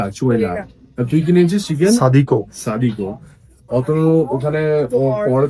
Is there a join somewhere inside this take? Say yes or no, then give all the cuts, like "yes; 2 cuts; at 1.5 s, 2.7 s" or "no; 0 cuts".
no; 0 cuts